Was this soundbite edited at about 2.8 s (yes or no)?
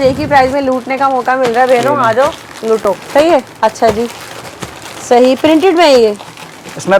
no